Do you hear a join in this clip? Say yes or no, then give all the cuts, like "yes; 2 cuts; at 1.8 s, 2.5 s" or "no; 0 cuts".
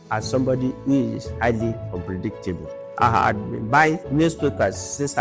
yes; 2 cuts; at 1.8 s, 2.8 s